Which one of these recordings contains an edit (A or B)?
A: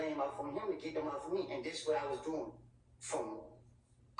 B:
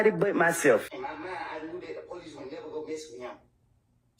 B